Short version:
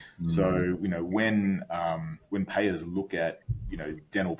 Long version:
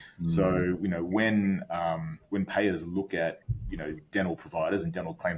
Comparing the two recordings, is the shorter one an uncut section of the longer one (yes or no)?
yes